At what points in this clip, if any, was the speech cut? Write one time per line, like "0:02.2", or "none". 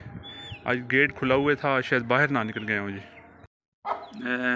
0:03.6